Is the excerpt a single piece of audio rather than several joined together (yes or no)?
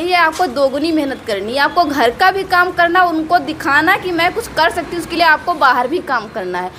yes